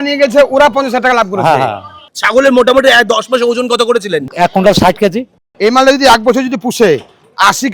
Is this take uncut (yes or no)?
no